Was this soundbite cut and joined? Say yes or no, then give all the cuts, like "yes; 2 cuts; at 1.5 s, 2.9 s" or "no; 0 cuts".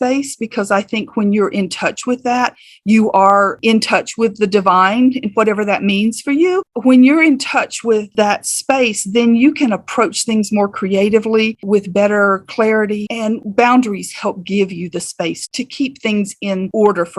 yes; 1 cut; at 13.4 s